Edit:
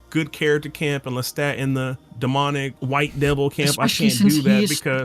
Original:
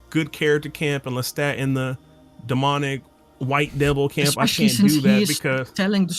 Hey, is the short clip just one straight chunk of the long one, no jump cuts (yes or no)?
no